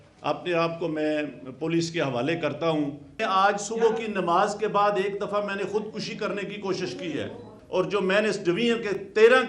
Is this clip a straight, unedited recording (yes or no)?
no